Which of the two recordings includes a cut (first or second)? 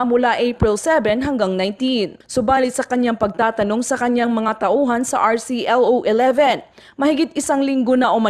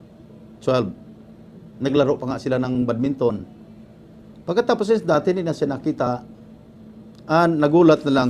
second